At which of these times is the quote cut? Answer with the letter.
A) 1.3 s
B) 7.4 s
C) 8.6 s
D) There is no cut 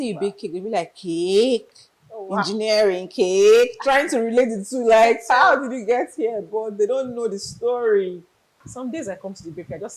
C